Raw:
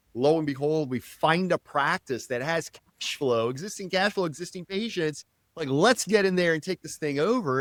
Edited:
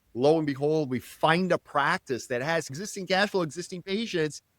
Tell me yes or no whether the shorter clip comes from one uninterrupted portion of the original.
no